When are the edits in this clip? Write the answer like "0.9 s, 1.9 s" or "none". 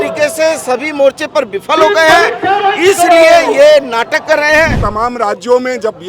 4.8 s